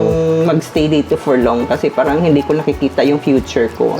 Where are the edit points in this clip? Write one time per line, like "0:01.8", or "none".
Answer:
none